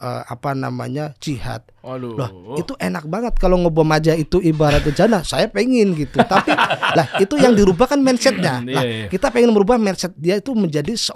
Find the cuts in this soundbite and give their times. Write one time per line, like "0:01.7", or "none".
none